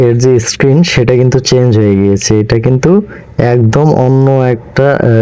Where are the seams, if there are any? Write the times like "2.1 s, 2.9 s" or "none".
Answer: none

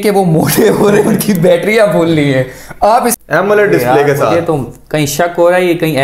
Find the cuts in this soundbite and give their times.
3.2 s

